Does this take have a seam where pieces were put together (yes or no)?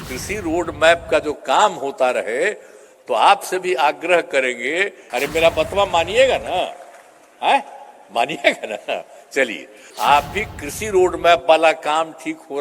yes